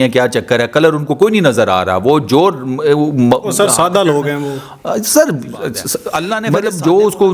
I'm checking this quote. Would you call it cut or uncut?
cut